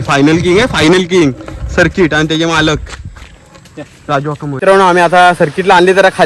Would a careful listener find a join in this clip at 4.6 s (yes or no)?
yes